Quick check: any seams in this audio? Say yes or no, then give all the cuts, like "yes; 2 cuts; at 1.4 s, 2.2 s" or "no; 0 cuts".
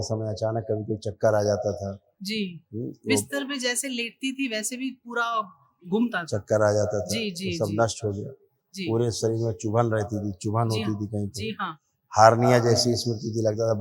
no; 0 cuts